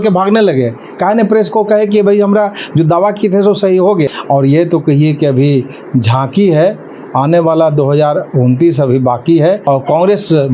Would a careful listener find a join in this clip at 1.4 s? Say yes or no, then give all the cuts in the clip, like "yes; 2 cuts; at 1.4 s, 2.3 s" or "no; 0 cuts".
no; 2 cuts; at 4.1 s, 9.6 s